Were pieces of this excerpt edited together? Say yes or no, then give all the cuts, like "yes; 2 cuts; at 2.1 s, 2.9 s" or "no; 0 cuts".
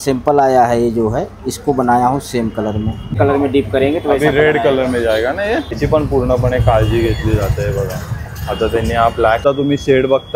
yes; 3 cuts; at 3.1 s, 5.8 s, 9.4 s